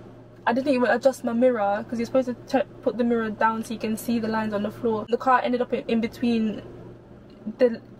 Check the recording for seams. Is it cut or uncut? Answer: uncut